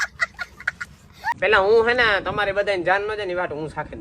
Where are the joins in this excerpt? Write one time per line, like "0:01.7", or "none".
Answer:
0:01.2